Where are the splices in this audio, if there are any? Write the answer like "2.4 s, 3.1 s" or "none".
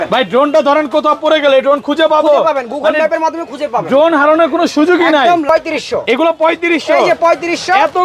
5.5 s